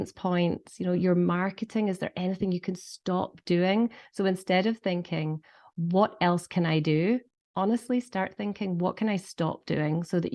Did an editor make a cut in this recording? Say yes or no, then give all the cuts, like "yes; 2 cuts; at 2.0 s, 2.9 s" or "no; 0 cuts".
no; 0 cuts